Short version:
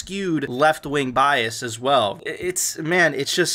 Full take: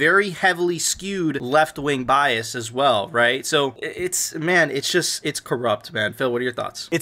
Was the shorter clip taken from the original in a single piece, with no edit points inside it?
no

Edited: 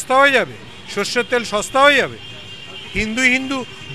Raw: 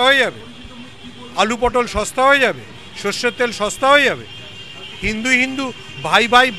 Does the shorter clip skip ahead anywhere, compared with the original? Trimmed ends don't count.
no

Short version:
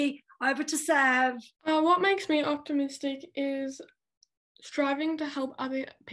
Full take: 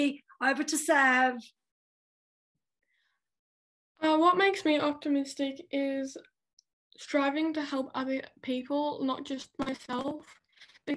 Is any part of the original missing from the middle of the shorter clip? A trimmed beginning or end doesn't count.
yes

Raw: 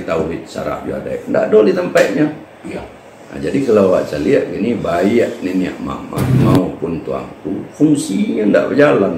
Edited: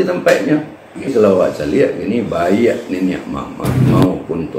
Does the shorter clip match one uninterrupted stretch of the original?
no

